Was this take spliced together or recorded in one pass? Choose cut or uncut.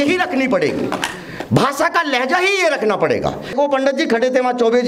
cut